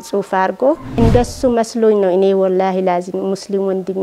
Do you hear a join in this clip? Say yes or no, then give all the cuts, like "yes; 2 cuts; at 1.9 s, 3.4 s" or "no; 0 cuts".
yes; 1 cut; at 0.9 s